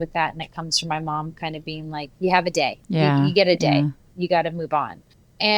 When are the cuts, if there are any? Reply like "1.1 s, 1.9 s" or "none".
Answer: 2.8 s, 4.1 s